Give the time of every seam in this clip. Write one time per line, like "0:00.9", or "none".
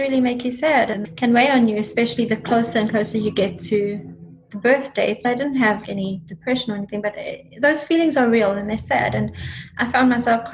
0:00.9
0:05.2
0:05.8